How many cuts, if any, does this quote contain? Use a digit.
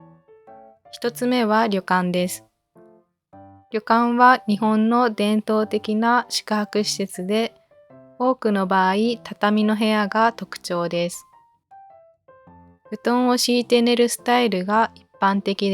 1